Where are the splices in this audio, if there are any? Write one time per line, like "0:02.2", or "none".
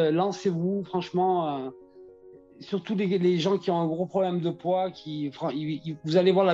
none